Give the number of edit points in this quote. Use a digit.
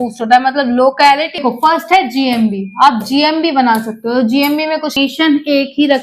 2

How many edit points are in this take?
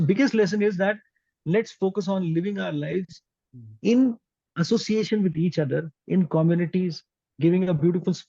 0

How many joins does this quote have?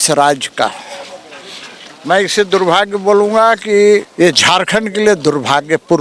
1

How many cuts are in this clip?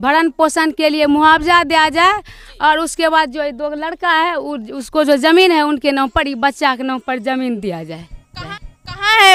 0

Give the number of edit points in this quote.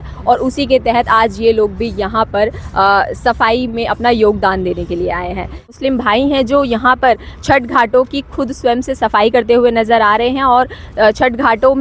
1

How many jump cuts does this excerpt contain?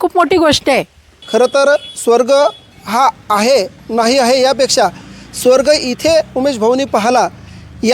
2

